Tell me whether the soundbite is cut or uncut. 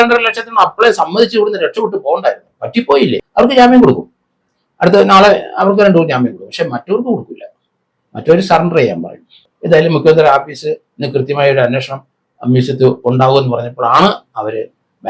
cut